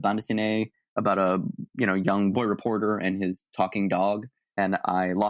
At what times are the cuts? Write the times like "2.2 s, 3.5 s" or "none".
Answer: 2.3 s, 4.4 s